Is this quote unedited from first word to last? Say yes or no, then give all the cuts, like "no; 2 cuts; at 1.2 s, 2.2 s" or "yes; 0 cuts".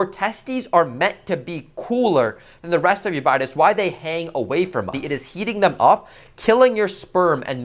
no; 1 cut; at 5.0 s